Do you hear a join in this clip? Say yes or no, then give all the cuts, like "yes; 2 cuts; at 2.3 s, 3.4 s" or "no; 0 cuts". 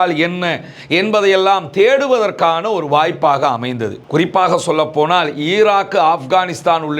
no; 0 cuts